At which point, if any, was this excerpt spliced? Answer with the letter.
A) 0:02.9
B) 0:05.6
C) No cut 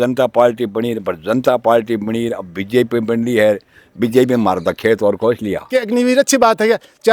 B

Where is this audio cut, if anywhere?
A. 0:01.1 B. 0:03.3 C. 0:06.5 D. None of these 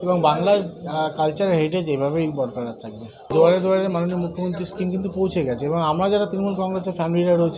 B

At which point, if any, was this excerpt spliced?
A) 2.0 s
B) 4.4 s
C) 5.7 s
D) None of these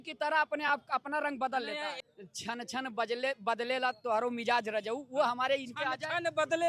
A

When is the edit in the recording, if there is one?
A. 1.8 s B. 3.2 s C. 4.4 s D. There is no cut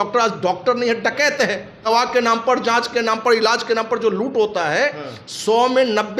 A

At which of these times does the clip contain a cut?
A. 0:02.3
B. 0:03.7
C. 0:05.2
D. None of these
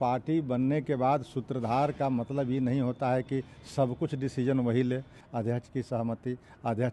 C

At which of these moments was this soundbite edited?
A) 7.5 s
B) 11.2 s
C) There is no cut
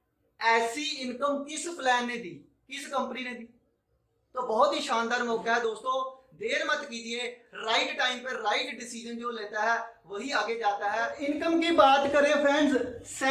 B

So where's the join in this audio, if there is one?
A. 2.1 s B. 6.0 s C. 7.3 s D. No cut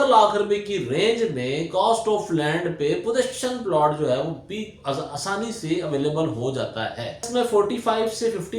C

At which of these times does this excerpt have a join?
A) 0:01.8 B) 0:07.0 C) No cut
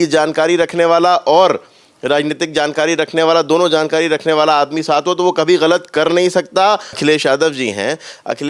B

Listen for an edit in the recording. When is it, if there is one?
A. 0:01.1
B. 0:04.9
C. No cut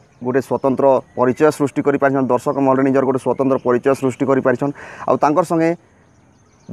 A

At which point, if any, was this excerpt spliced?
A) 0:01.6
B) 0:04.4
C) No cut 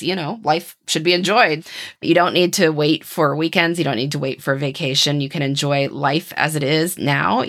A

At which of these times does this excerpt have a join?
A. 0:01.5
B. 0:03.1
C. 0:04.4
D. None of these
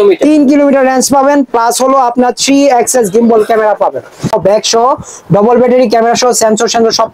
C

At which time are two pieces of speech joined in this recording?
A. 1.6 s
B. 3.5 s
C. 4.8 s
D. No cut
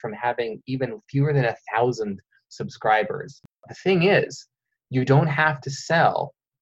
B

